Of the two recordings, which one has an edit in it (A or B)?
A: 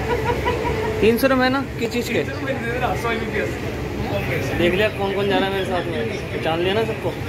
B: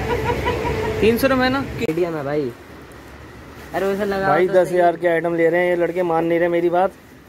B